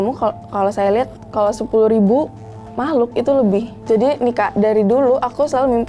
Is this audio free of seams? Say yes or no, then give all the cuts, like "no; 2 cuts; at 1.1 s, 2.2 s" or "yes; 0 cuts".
no; 1 cut; at 3.7 s